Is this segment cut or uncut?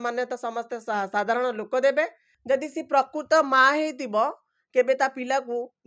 cut